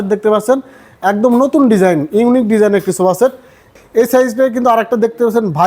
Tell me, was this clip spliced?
yes; 1 cut; at 3.7 s

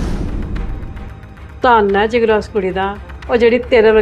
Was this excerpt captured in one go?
no; 1 cut; at 1.0 s

